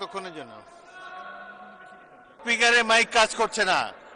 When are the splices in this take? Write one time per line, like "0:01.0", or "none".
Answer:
0:02.4